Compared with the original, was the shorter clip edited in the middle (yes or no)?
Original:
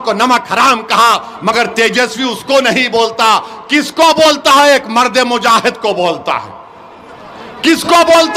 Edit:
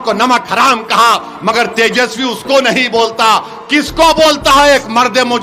no